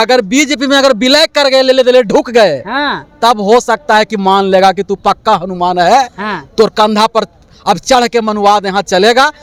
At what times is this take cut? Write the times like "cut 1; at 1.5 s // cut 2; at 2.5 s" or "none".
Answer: none